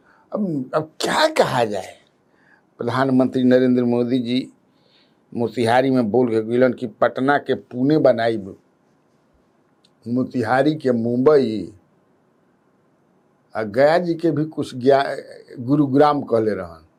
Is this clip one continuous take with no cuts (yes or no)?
yes